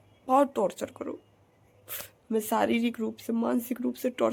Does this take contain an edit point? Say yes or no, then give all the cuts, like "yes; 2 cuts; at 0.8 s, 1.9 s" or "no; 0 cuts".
no; 0 cuts